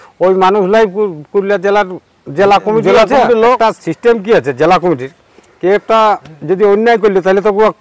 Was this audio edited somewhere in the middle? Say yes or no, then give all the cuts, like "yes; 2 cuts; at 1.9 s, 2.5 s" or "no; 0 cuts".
yes; 1 cut; at 3.6 s